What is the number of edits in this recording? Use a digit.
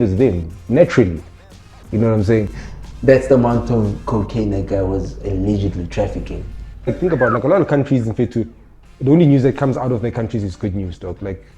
2